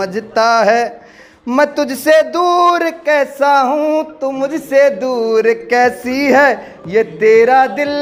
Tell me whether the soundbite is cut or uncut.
uncut